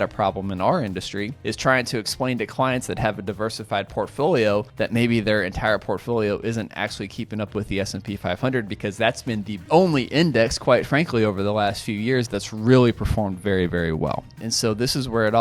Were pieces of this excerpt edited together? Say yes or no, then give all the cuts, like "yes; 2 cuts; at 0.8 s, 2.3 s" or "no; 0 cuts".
yes; 4 cuts; at 1.3 s, 4.7 s, 9.6 s, 14.4 s